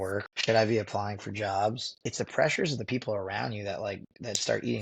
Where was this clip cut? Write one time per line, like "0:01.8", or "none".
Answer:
0:02.0